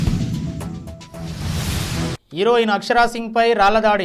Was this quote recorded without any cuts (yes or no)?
no